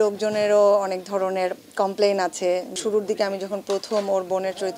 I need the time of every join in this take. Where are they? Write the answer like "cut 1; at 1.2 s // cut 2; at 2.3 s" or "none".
cut 1; at 2.7 s